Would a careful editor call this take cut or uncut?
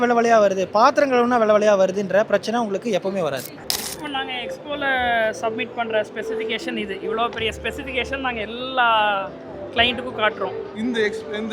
cut